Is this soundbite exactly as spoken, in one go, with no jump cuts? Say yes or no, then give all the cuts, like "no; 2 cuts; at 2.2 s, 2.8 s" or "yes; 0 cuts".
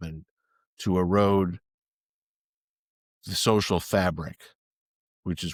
yes; 0 cuts